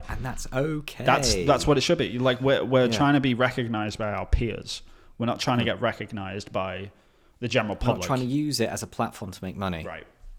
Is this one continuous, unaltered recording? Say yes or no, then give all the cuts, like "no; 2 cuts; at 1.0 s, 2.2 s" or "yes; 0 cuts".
yes; 0 cuts